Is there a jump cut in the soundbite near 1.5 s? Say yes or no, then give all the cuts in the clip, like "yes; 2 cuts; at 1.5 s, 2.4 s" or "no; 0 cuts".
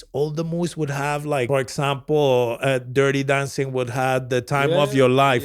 yes; 1 cut; at 1.5 s